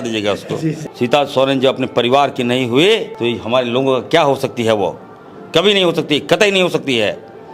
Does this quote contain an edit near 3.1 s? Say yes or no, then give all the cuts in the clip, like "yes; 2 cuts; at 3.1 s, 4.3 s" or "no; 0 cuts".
yes; 2 cuts; at 0.9 s, 3.1 s